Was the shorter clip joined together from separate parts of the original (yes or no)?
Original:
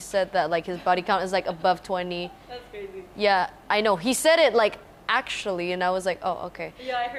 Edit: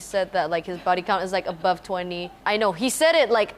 yes